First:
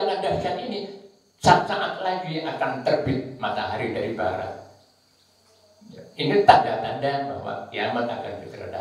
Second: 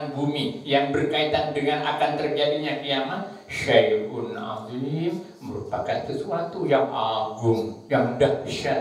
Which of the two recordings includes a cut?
second; 1 cut; at 7.8 s

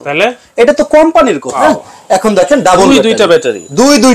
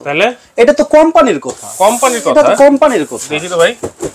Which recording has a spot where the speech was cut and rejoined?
first; 1 cut; at 1.6 s

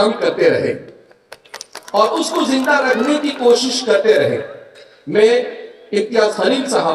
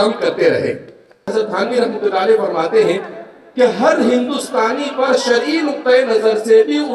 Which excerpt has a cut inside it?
second; 1 cut; at 1.3 s

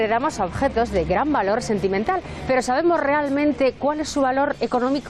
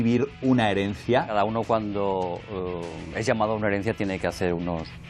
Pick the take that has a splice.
second; 1 cut; at 1.3 s

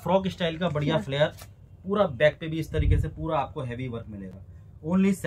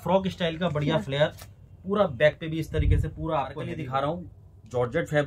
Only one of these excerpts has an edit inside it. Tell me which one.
second; 1 cut; at 3.6 s

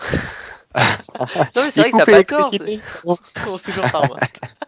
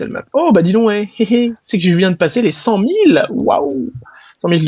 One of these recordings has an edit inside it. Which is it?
first; 1 cut; at 3.4 s

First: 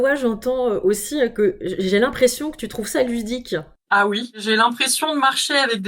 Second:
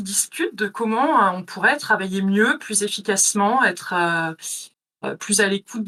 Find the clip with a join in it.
first; 1 cut; at 4.4 s

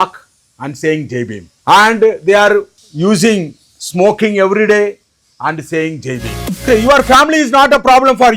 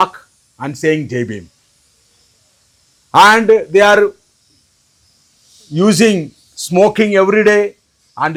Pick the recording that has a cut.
first; 3 cuts; at 1.5 s, 2.8 s, 6.4 s

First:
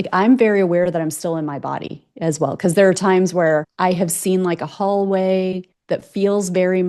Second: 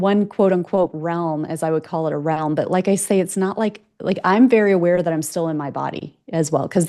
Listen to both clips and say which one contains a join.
first; 2 cuts; at 3.7 s, 5.7 s

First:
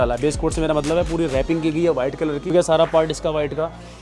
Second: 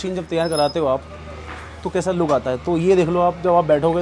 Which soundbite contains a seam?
first; 1 cut; at 2.5 s

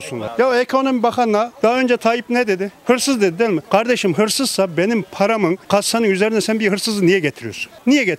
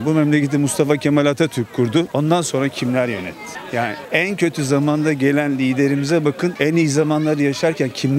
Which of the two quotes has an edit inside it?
first; 2 cuts; at 1.5 s, 2.8 s

